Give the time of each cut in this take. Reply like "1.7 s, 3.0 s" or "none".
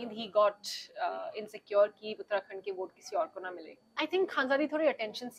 4.0 s